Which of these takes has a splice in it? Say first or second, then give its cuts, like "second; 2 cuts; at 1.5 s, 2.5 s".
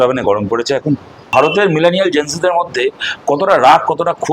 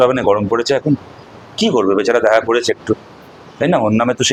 first; 1 cut; at 1.2 s